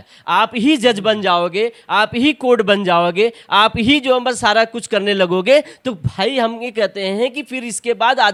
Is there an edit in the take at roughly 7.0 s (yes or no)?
no